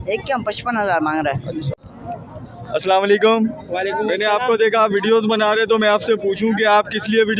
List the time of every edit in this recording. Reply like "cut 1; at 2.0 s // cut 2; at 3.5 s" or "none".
cut 1; at 1.7 s